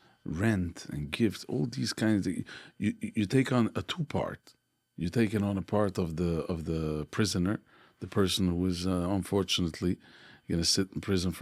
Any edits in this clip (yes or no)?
no